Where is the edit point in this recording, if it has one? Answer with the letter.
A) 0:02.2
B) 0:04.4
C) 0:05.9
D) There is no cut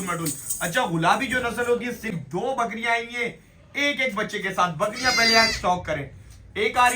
A